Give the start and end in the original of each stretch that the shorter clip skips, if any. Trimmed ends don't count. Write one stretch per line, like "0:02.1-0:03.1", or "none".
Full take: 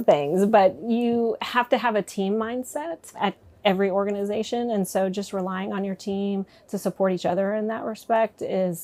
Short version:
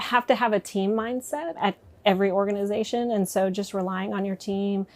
0:02.9-0:03.1

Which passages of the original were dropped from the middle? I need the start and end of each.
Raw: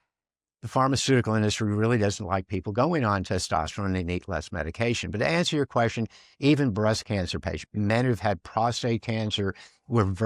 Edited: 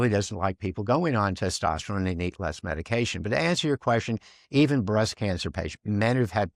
none

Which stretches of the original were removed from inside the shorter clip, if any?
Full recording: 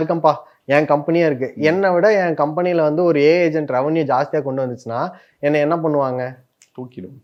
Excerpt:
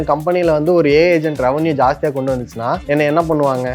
0:05.1-0:05.3

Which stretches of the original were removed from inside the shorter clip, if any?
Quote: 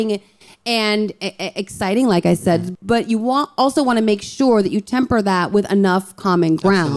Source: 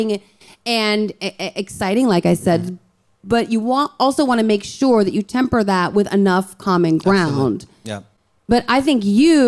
0:02.7-0:03.1

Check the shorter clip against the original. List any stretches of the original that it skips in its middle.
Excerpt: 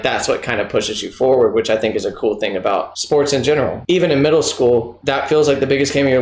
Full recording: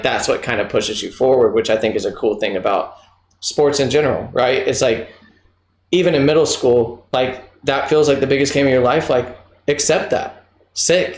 0:02.9-0:03.4
0:04.2-0:05.8
0:07.0-0:07.5

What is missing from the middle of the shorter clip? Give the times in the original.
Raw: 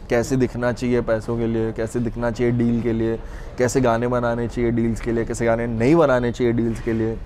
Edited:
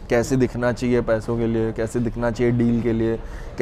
none

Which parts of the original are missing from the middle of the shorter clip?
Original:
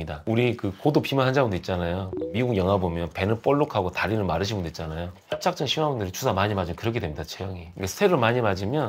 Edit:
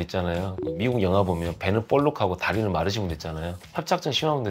none

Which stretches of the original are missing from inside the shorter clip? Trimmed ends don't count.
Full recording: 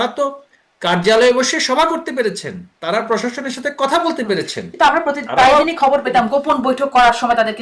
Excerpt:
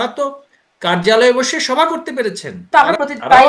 0:02.5-0:04.6

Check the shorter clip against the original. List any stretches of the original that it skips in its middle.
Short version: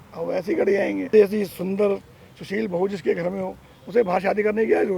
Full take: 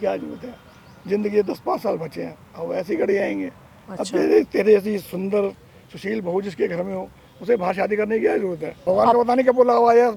0:03.5-0:04.6

